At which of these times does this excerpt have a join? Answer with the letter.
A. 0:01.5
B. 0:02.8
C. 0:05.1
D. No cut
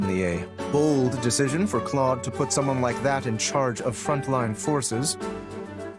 C